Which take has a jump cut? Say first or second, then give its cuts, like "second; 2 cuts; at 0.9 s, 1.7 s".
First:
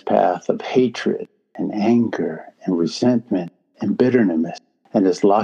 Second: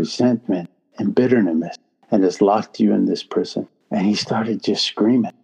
second; 1 cut; at 3.8 s